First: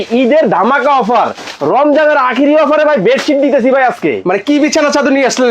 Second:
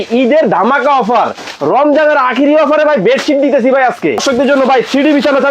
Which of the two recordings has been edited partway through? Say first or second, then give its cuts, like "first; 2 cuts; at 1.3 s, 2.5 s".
second; 1 cut; at 4.2 s